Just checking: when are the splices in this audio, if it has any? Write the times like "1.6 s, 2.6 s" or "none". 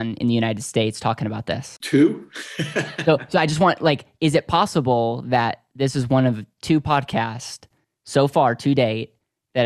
1.7 s

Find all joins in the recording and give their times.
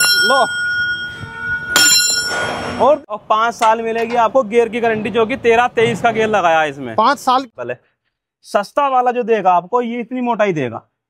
3.0 s, 7.5 s

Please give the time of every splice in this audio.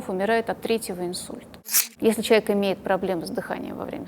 1.7 s

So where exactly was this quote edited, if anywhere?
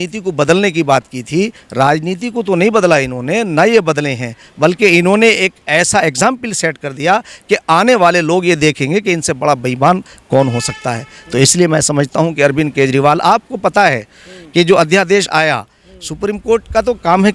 none

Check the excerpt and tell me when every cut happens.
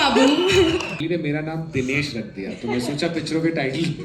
1.0 s

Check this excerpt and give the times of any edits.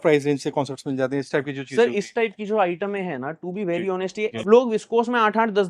4.4 s

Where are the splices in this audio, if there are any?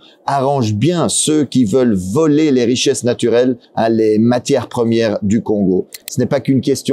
3.7 s, 6.0 s

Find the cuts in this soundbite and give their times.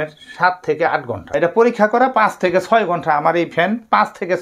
1.3 s

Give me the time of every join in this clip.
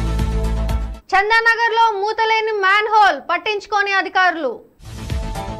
none

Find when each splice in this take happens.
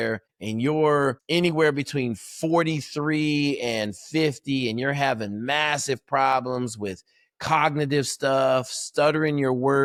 none

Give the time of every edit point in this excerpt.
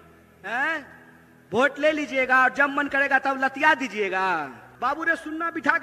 4.6 s

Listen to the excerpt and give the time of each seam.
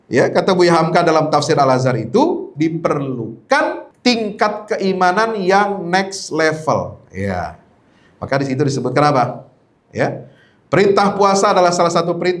3.9 s

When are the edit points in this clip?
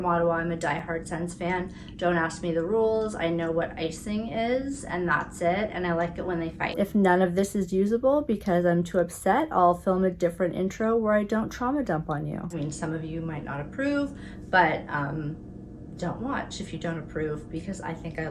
6.7 s, 12.5 s

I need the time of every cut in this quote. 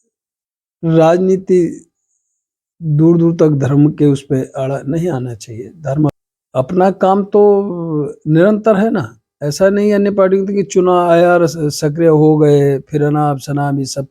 6.3 s

